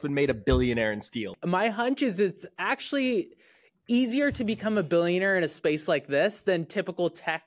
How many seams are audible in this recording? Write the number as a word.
one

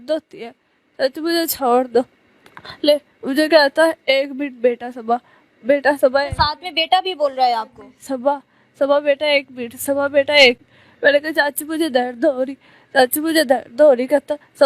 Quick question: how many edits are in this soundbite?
zero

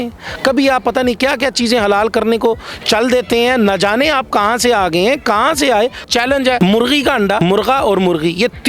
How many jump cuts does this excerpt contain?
two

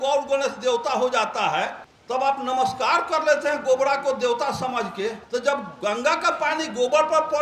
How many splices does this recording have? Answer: two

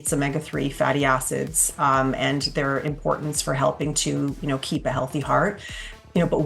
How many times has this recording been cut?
zero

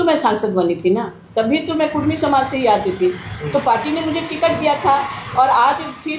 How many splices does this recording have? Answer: zero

